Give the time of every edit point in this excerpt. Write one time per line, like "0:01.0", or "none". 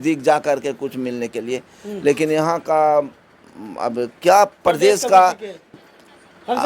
0:05.7